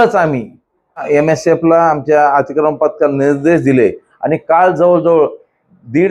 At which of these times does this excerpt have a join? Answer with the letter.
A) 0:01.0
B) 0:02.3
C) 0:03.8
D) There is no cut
A